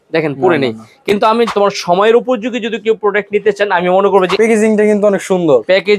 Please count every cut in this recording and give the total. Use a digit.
2